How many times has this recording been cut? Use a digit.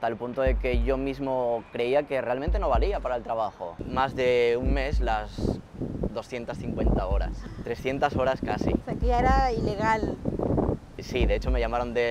1